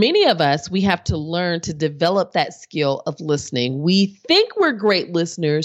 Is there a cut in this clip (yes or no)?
no